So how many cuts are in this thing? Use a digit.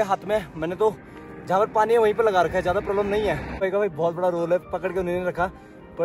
1